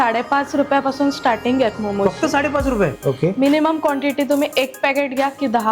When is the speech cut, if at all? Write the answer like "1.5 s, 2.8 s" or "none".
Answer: 3.0 s